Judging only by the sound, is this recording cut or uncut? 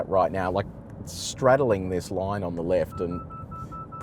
uncut